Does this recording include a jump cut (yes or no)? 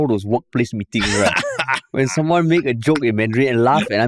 no